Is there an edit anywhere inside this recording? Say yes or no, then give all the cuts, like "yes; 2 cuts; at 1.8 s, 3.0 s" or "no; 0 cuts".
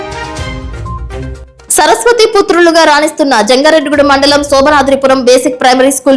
yes; 1 cut; at 1.1 s